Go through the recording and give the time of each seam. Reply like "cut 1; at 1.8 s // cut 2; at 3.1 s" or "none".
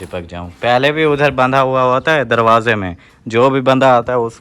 none